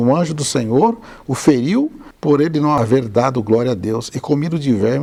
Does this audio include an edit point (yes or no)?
no